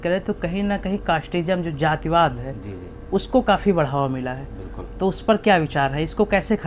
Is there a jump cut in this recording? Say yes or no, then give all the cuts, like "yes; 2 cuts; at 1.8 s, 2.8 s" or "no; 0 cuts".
no; 0 cuts